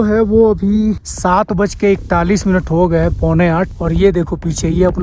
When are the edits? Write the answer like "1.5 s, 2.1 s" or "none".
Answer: 1.1 s, 3.8 s

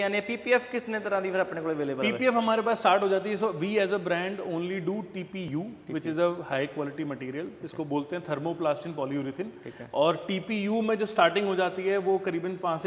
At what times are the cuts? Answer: none

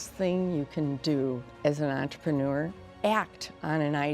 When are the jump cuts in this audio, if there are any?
2.8 s

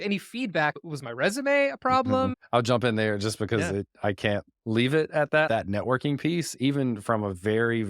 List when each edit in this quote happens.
0.7 s, 2.4 s, 5.5 s

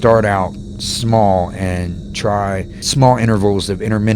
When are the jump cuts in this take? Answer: 2.8 s

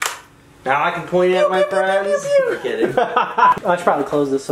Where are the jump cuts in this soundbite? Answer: 3.5 s

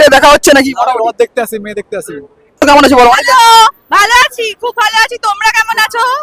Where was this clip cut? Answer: 2.4 s

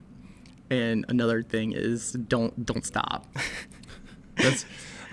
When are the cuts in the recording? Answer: none

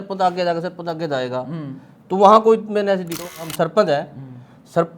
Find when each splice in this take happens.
3.2 s

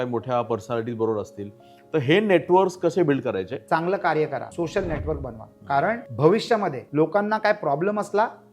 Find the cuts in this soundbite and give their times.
3.5 s, 4.5 s, 6.1 s, 6.8 s

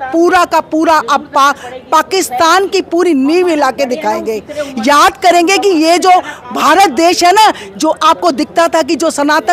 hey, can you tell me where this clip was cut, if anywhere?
none

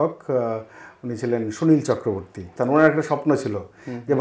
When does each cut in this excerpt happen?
2.5 s

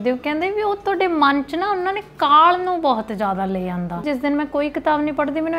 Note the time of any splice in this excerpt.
4.0 s

